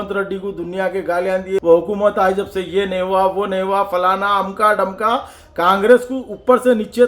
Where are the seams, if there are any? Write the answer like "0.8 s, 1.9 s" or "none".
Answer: 1.6 s